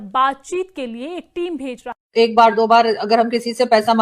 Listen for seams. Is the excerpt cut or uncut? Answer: cut